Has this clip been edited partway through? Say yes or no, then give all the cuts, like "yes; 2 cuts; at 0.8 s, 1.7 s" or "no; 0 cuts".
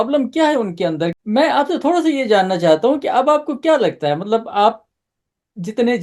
yes; 1 cut; at 1.1 s